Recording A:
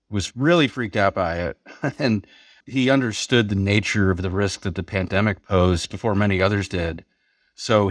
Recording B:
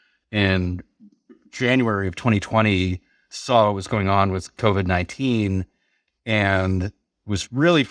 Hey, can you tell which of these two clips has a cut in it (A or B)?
A